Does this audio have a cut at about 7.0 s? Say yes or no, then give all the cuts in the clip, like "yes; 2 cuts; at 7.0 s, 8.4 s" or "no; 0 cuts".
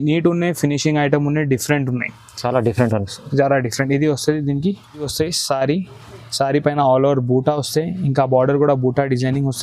no; 1 cut; at 5.1 s